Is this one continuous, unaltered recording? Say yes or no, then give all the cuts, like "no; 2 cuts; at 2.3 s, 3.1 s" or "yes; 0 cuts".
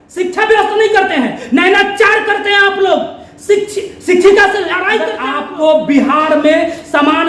no; 1 cut; at 5.3 s